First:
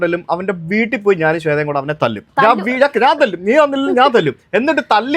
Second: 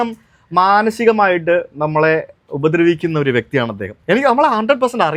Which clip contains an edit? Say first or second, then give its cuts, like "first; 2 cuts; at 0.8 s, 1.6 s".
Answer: first; 1 cut; at 2.2 s